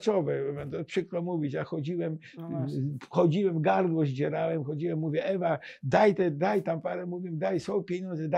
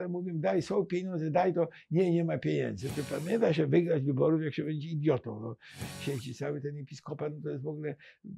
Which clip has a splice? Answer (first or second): second